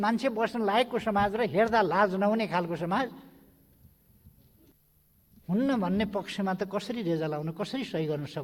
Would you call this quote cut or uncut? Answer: cut